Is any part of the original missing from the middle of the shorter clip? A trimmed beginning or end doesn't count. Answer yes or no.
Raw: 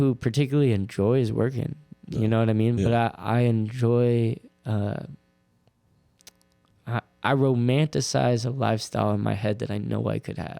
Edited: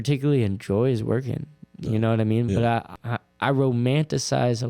yes